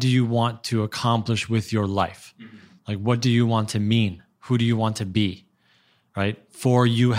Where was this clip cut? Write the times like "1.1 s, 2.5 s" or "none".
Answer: none